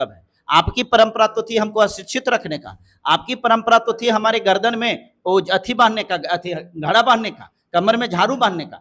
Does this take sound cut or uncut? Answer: uncut